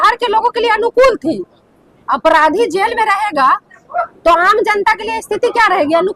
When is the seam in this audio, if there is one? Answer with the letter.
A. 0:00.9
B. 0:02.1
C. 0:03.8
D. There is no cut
D